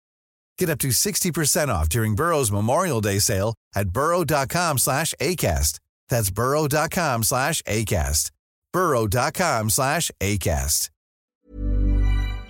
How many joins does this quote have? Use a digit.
1